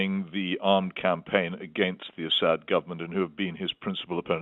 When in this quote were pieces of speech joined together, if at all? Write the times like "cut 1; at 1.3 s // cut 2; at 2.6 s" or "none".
none